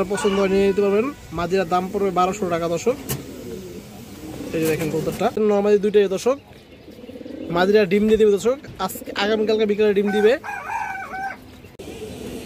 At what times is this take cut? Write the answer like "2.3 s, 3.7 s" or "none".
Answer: 5.4 s, 11.7 s